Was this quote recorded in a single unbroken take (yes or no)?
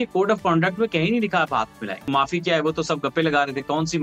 no